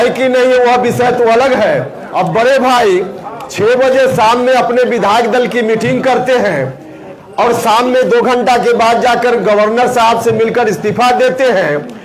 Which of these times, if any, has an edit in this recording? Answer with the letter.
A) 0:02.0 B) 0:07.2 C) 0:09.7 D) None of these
A